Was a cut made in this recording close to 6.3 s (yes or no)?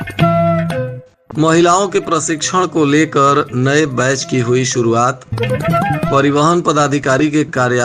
no